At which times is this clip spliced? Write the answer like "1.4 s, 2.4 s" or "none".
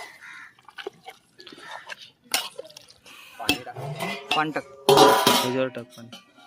none